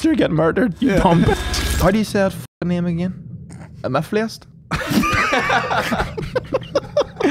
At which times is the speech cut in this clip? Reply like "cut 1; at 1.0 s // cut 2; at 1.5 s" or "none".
cut 1; at 1.3 s